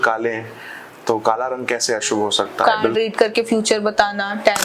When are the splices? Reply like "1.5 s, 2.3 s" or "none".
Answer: 2.8 s